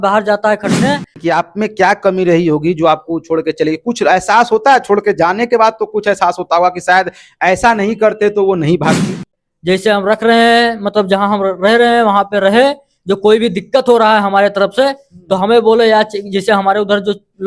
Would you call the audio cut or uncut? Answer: cut